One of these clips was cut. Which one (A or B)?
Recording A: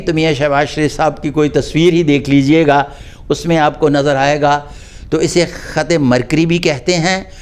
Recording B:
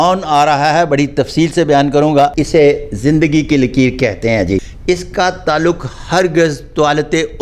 B